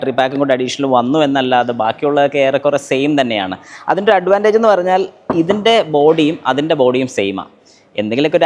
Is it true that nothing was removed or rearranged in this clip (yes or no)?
yes